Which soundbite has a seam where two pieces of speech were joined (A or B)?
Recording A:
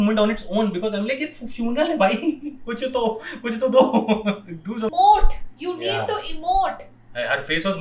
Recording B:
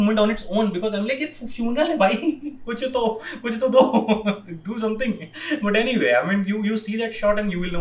A